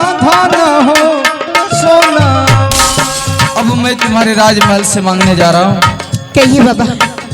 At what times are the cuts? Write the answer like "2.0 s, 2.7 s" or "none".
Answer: 3.5 s